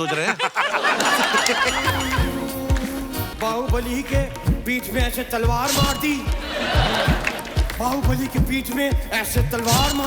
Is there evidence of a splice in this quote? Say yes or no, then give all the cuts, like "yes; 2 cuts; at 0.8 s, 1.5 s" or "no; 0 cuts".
yes; 1 cut; at 2.0 s